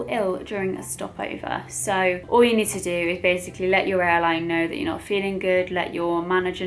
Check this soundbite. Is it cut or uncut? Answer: uncut